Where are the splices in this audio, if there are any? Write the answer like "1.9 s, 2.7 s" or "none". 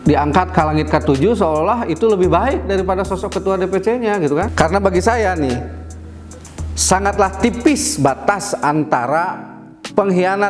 4.5 s